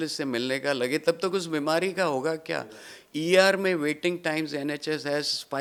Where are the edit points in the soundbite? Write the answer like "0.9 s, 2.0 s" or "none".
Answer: none